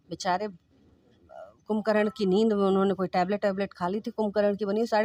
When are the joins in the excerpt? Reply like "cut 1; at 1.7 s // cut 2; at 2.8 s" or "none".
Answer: none